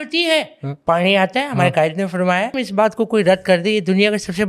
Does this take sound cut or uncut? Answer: cut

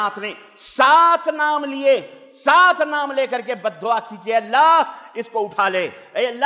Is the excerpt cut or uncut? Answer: uncut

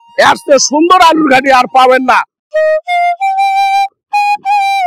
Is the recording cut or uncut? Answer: cut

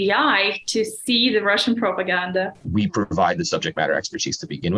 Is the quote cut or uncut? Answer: cut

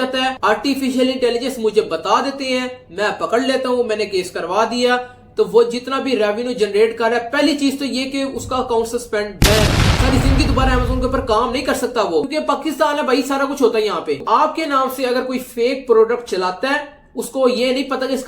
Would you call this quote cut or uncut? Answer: cut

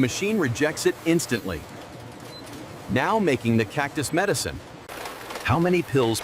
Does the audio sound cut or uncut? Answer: cut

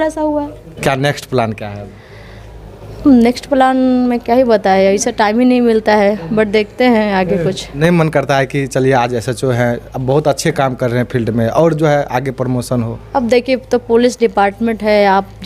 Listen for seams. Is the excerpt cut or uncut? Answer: cut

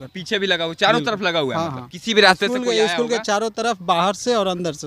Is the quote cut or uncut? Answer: uncut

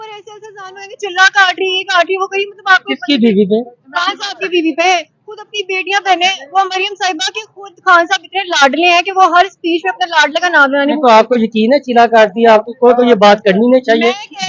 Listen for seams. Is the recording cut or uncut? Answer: uncut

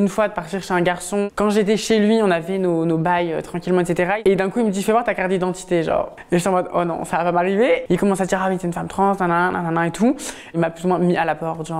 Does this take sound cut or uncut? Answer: cut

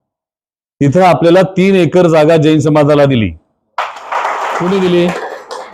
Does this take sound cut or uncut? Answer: cut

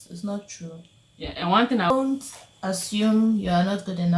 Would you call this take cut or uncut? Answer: cut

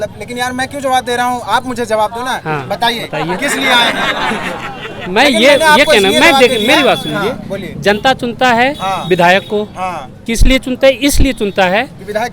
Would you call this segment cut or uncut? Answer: uncut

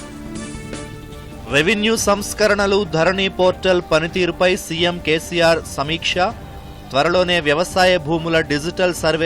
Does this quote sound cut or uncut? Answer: cut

